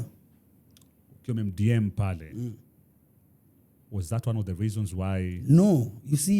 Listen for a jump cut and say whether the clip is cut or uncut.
uncut